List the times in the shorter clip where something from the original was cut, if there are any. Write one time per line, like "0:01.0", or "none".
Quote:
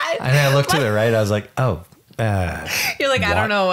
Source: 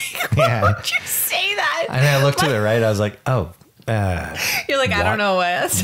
none